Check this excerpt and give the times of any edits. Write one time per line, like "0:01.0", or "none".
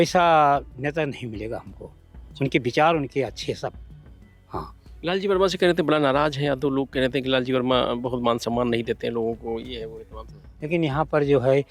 none

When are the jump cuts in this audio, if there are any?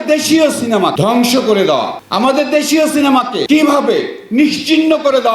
0:00.9
0:02.0
0:03.4

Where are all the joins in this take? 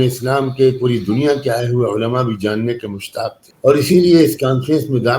0:03.5

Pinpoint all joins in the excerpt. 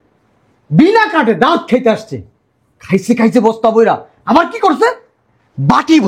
none

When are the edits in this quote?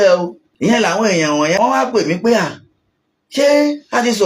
0:00.7
0:01.6

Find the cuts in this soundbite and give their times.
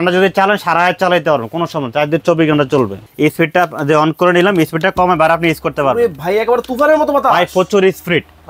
0:03.0

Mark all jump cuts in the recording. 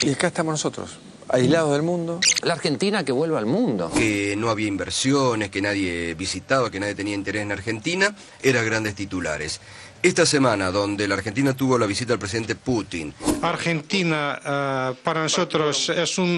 0:04.0

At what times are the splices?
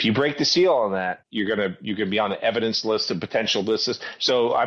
0:01.2

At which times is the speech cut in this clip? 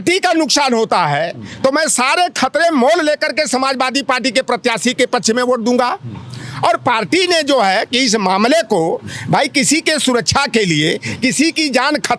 none

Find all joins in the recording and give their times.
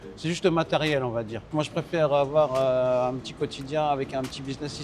0:01.4

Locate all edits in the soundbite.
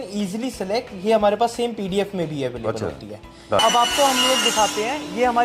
0:03.6

